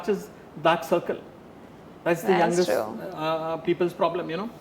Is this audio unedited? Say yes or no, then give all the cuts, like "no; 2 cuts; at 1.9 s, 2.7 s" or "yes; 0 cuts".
yes; 0 cuts